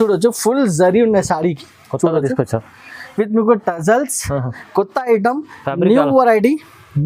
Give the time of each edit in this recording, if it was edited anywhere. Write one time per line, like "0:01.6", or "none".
none